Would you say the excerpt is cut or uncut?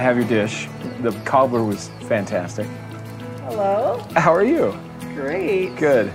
uncut